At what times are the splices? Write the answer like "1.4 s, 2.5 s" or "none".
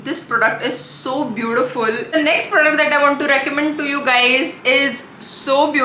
2.1 s